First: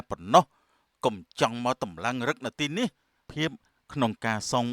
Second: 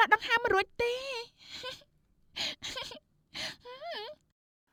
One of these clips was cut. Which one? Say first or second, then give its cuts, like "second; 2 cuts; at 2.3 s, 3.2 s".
first; 1 cut; at 3.2 s